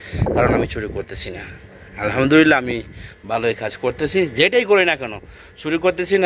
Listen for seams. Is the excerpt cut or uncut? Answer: uncut